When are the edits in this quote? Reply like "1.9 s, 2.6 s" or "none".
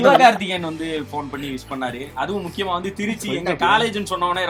none